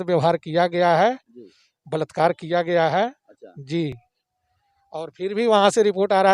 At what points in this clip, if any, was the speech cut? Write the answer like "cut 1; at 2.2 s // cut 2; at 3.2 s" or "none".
none